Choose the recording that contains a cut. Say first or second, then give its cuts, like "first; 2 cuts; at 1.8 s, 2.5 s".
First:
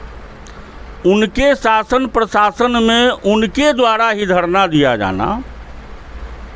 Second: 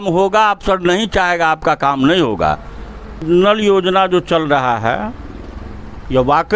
second; 1 cut; at 3.2 s